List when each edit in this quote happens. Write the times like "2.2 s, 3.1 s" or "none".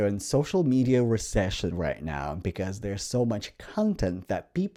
none

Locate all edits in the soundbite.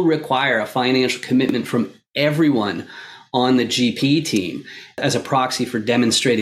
5.0 s

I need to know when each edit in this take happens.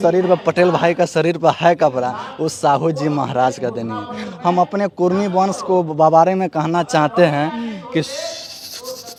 none

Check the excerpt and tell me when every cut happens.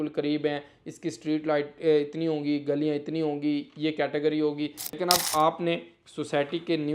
5.0 s

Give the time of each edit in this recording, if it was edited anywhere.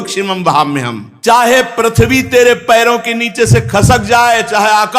1.0 s

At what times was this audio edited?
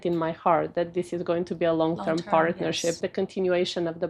3.0 s

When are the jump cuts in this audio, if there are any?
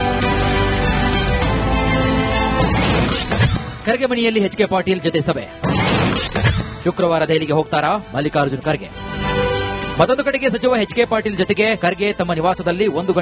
1.6 s

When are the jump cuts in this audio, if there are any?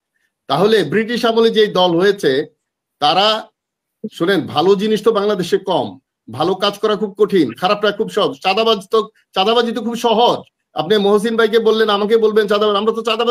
none

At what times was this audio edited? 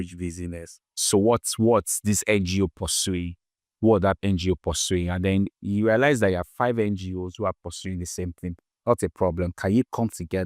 0.9 s

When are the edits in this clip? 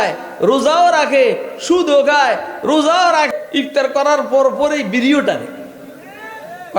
3.3 s

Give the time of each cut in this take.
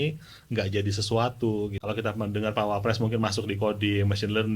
1.7 s

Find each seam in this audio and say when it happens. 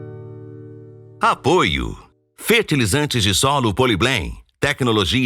1.0 s

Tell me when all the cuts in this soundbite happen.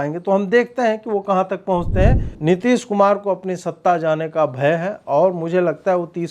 2.3 s

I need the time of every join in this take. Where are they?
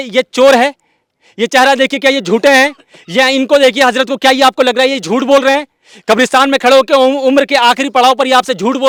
none

